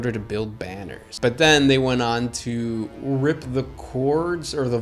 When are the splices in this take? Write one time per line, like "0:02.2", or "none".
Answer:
0:01.1